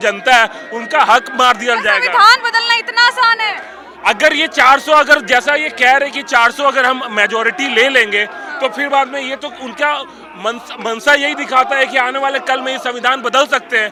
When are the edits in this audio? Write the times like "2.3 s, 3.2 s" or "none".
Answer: none